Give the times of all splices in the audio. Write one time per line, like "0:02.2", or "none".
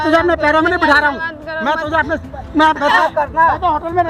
0:02.9